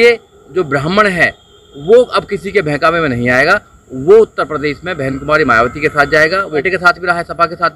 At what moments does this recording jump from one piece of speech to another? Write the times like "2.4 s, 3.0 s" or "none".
6.6 s